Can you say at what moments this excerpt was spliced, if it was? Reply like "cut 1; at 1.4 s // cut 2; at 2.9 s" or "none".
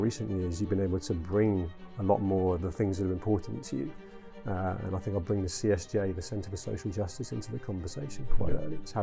none